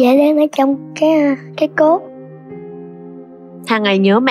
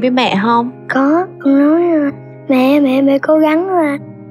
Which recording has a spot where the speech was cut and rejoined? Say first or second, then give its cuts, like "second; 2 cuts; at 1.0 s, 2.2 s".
second; 1 cut; at 1.3 s